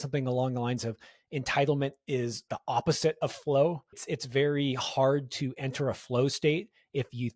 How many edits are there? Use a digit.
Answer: 2